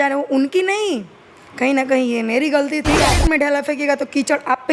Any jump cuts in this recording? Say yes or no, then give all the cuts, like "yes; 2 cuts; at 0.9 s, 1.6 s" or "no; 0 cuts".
yes; 1 cut; at 3.1 s